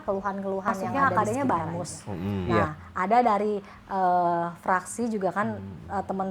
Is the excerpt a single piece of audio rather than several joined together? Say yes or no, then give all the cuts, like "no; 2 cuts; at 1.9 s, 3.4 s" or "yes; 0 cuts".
no; 1 cut; at 0.9 s